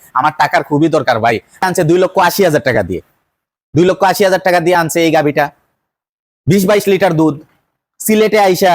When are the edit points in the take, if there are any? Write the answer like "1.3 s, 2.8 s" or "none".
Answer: 1.6 s